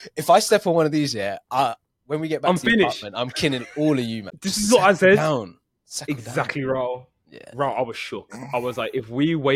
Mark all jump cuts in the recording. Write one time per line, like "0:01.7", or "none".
0:04.3